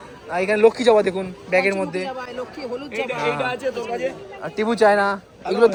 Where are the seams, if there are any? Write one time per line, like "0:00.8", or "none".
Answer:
none